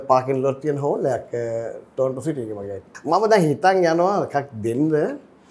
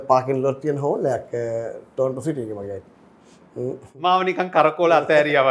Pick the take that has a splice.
first; 1 cut; at 2.9 s

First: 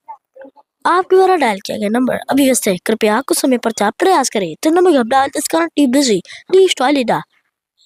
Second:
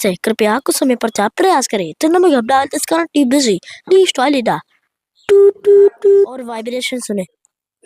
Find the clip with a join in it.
second; 1 cut; at 6.6 s

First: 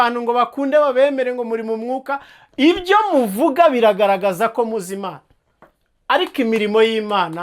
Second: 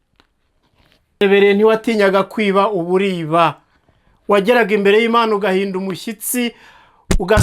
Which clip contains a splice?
second; 1 cut; at 1.2 s

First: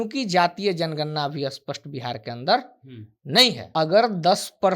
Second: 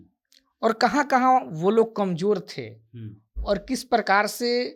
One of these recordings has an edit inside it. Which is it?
first; 1 cut; at 3.6 s

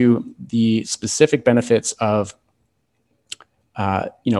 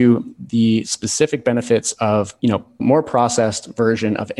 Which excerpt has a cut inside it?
second; 1 cut; at 2.8 s

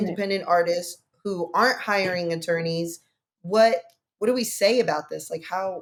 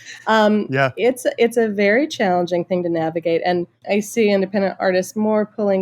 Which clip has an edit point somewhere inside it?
second; 1 cut; at 3.7 s

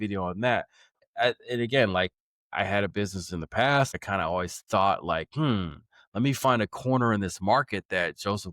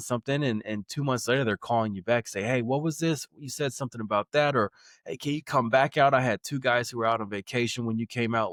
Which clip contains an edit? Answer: first; 2 cuts; at 1.0 s, 3.9 s

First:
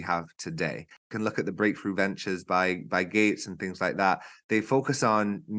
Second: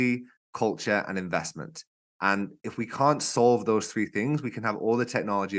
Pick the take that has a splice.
first; 1 cut; at 1.1 s

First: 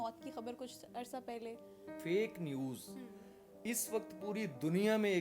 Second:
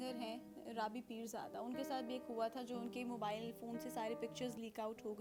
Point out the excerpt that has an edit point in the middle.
first; 1 cut; at 1.8 s

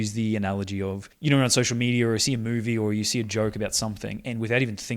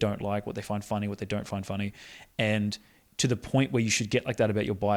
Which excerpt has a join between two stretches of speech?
first; 1 cut; at 1.1 s

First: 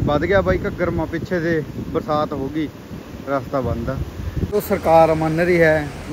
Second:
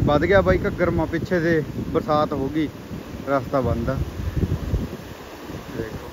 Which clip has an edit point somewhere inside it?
first; 1 cut; at 4.5 s

